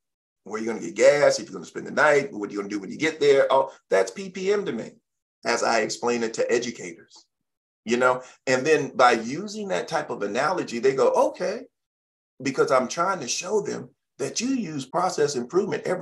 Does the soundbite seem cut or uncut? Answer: cut